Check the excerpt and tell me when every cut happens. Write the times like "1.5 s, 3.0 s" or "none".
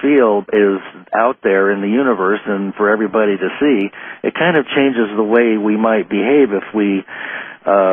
none